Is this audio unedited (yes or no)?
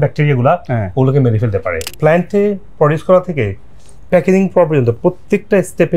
no